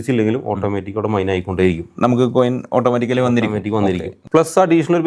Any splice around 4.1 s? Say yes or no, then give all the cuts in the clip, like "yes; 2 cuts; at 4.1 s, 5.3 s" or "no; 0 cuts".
yes; 1 cut; at 4.1 s